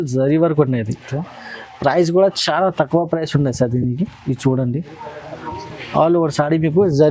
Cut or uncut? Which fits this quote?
uncut